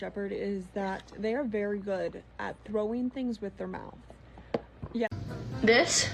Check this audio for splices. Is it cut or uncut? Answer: cut